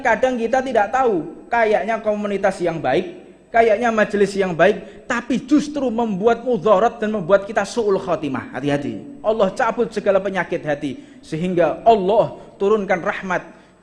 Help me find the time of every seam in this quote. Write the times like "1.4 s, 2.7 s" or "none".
9.1 s